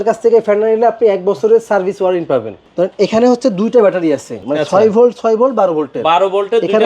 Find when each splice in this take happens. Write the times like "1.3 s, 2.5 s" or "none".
2.5 s, 4.3 s